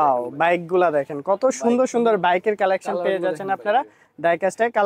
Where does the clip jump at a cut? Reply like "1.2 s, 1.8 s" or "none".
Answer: none